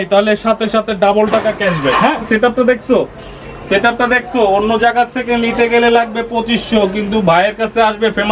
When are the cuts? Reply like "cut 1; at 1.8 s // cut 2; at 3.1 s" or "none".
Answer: cut 1; at 2.2 s